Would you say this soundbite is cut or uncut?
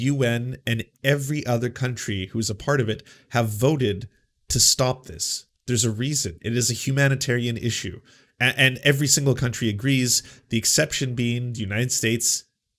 uncut